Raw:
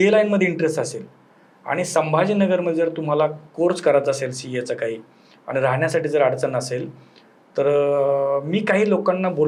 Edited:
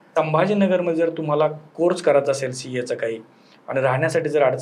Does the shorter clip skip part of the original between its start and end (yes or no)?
no